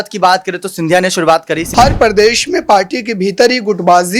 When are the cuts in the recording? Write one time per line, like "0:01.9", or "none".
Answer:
0:01.6